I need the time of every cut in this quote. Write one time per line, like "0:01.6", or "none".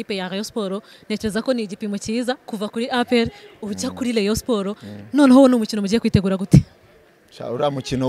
none